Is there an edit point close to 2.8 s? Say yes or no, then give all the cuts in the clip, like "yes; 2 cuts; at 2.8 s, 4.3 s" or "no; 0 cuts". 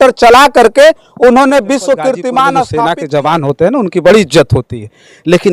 yes; 1 cut; at 2.8 s